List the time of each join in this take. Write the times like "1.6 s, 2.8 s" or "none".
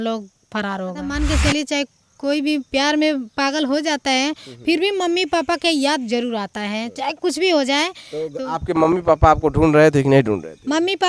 1.1 s

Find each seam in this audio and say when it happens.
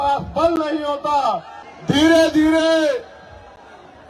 1.6 s

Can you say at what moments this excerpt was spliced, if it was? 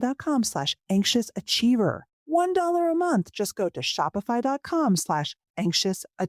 2.1 s

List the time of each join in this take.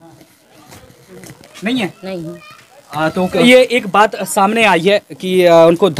3.4 s

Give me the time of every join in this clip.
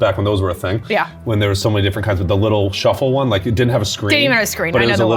none

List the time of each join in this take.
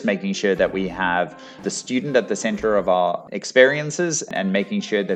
1.6 s, 3.2 s, 4.3 s

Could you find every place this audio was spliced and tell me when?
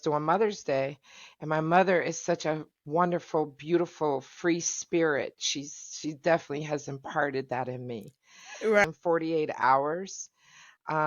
8.8 s

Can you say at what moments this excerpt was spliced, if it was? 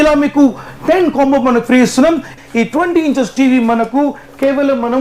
2.3 s

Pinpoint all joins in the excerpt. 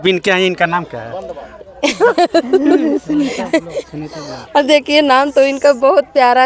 none

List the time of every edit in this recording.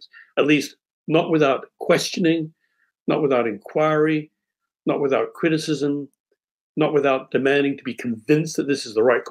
none

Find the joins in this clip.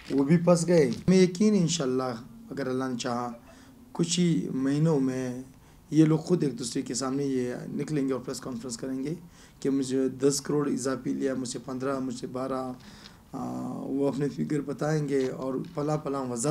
1.0 s

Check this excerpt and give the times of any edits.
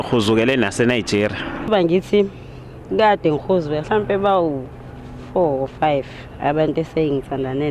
1.7 s

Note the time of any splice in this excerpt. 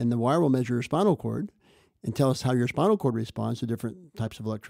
none

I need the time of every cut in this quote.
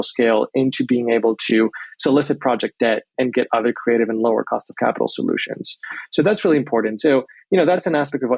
3.1 s

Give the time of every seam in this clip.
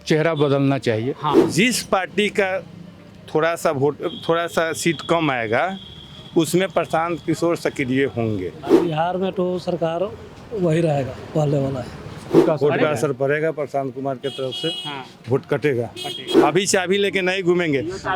1.4 s, 8.6 s, 12.3 s, 16.3 s

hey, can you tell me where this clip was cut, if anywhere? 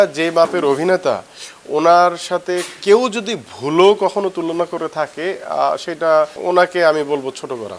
6.4 s

